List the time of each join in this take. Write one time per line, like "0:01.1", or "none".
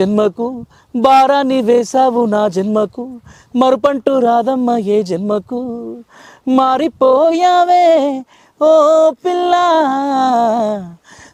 none